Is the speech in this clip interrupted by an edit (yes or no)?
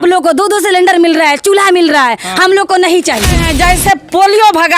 yes